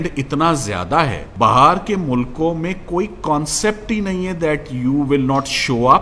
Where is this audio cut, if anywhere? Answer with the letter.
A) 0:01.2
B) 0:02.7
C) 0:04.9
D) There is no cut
A